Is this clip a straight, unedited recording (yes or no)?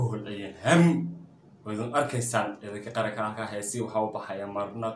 yes